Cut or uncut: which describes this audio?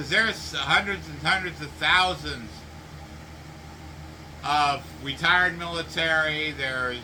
uncut